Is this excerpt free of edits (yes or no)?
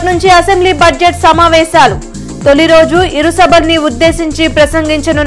yes